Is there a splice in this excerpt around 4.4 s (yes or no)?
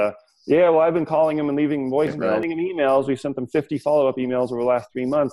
no